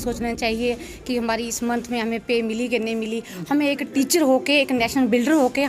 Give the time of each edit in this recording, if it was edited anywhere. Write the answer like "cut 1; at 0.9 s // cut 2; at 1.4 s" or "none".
none